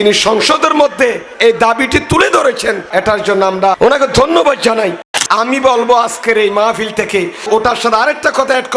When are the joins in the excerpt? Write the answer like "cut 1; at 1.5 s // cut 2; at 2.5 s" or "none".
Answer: cut 1; at 5.2 s